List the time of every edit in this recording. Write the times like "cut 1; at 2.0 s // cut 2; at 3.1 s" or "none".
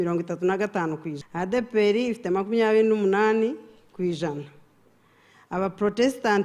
cut 1; at 1.2 s